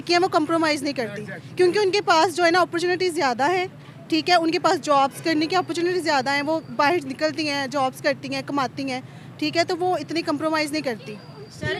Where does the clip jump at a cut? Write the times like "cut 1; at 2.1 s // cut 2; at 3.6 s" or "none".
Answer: none